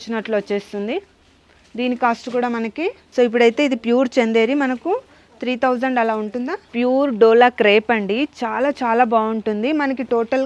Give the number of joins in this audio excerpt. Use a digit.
2